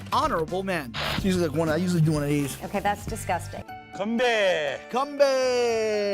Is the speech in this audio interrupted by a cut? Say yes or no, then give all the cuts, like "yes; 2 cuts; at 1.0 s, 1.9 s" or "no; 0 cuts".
yes; 1 cut; at 3.6 s